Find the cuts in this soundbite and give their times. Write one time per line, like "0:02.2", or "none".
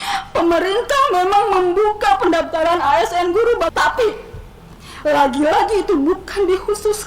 0:03.7